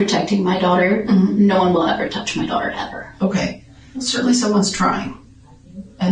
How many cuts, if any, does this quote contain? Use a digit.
1